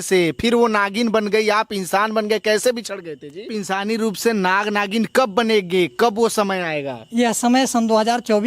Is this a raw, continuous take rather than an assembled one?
no; 1 cut; at 3.5 s

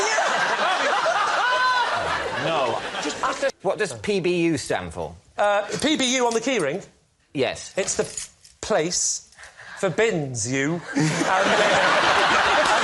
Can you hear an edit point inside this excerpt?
yes; 1 cut; at 3.6 s

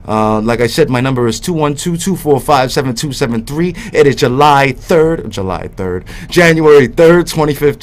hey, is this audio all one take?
no; 1 cut; at 6.5 s

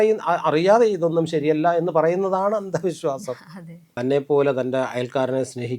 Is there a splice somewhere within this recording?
yes; 1 cut; at 3.9 s

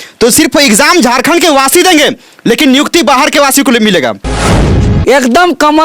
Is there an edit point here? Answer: yes; 1 cut; at 4.5 s

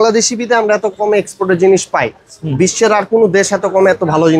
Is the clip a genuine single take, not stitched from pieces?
yes; 0 cuts

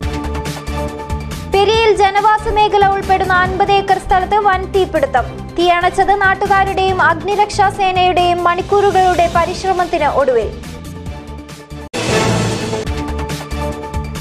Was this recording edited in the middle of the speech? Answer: no; 0 cuts

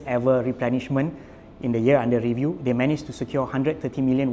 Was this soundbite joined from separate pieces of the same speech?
no; 0 cuts

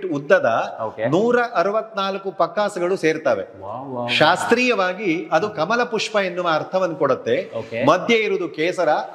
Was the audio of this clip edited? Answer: no; 0 cuts

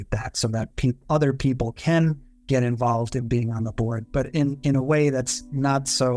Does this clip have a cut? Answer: no; 0 cuts

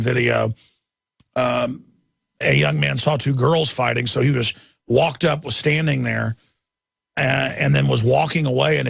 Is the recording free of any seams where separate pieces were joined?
no; 1 cut; at 6.0 s

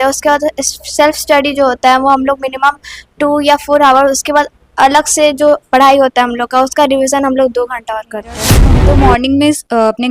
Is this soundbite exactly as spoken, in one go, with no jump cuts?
no; 1 cut; at 8.8 s

